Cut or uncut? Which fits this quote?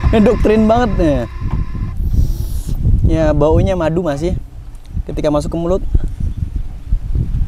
uncut